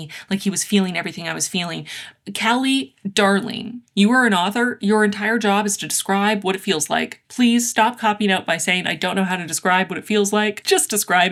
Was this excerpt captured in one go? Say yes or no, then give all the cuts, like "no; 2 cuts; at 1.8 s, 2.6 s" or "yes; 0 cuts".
yes; 0 cuts